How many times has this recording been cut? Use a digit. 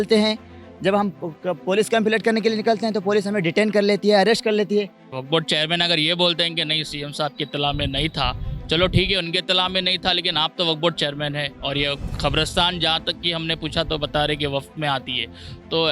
1